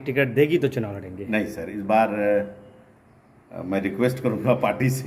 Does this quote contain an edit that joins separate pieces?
no; 0 cuts

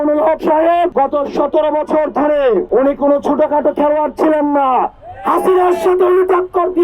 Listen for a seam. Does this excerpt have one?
yes; 2 cuts; at 0.9 s, 2.7 s

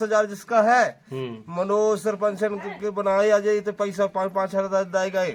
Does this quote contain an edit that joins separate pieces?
no; 0 cuts

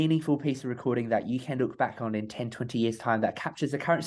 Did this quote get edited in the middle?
no; 0 cuts

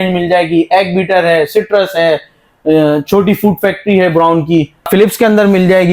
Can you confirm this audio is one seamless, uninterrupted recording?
no; 1 cut; at 4.9 s

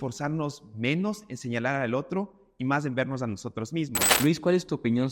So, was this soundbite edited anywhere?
yes; 1 cut; at 4.0 s

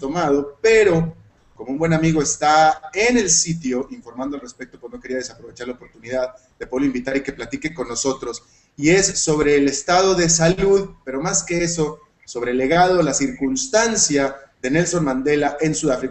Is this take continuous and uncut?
no; 1 cut; at 8.3 s

